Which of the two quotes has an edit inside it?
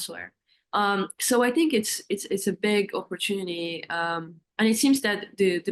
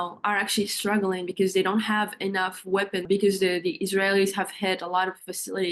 second; 1 cut; at 3.0 s

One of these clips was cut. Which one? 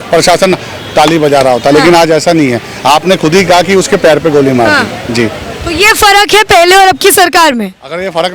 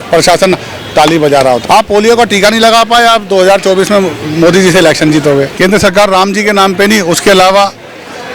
second; 2 cuts; at 1.6 s, 5.5 s

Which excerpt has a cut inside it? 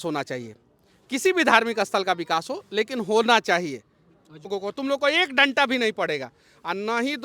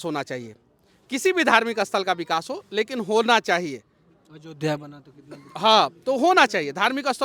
first; 1 cut; at 4.5 s

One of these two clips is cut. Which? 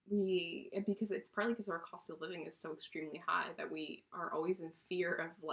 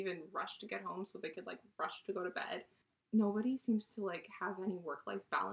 second; 1 cut; at 2.9 s

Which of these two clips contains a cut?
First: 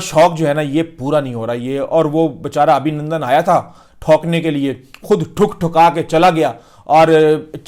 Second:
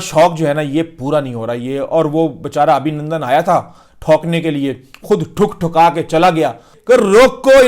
second; 1 cut; at 6.7 s

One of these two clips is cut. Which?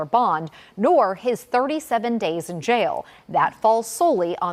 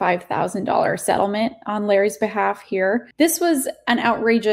second; 1 cut; at 3.1 s

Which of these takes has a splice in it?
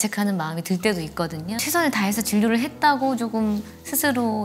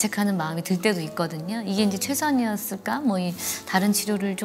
first; 1 cut; at 1.5 s

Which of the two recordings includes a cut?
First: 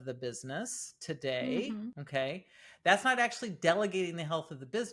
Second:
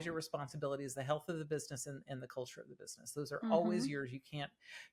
first; 1 cut; at 2.0 s

